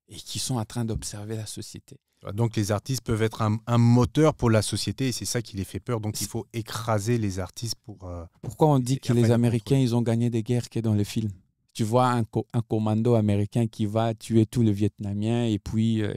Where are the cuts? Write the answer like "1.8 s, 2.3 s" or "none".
8.3 s